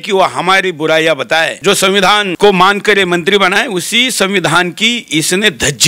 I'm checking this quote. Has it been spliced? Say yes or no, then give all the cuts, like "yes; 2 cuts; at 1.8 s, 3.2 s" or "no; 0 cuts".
yes; 1 cut; at 2.1 s